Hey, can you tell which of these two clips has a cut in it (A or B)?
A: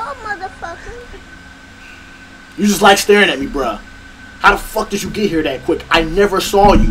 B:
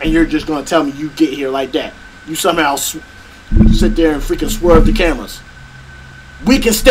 A